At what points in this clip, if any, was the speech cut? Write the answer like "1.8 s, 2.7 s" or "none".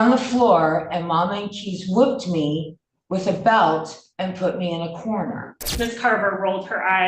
5.6 s